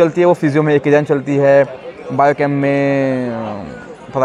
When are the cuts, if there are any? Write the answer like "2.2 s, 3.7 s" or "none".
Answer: none